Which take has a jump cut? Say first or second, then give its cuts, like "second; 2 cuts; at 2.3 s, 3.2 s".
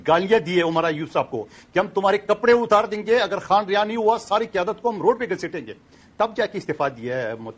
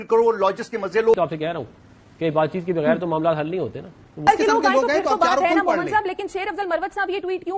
second; 2 cuts; at 1.1 s, 4.1 s